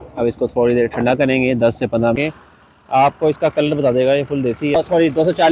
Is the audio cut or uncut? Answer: cut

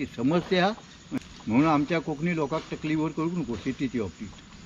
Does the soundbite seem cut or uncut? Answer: cut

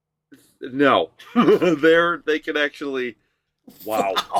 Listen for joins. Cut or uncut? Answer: uncut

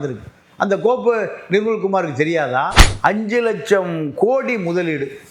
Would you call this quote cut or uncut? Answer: cut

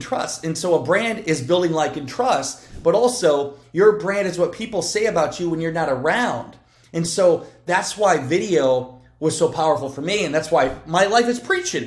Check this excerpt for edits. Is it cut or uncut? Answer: uncut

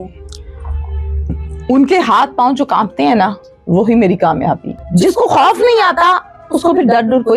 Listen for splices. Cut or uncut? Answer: cut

